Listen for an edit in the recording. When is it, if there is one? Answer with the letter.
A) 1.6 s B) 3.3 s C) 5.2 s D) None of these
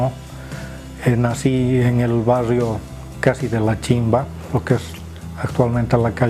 B